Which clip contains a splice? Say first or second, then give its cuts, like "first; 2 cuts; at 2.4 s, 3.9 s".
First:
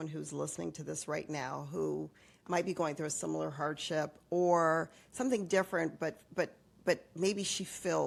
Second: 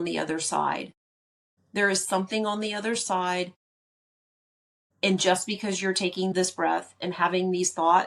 second; 1 cut; at 6.3 s